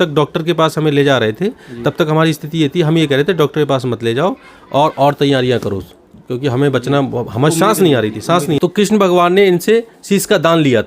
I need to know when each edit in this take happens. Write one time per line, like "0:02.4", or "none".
0:08.6